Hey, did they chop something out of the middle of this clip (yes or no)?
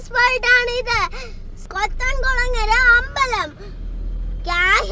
no